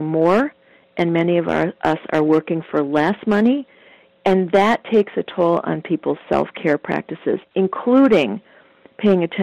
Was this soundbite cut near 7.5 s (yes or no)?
no